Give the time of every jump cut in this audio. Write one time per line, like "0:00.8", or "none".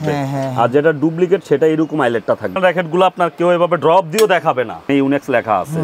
0:02.6
0:04.9